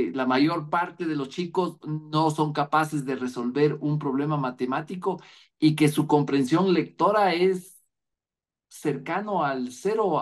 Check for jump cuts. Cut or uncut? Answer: uncut